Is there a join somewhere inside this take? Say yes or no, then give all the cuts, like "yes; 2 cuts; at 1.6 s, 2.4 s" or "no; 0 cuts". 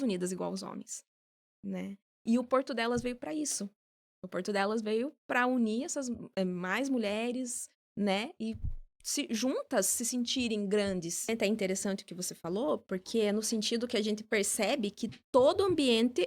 yes; 1 cut; at 11.3 s